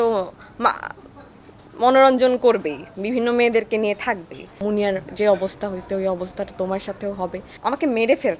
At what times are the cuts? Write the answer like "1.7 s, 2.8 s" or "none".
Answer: 4.5 s, 7.5 s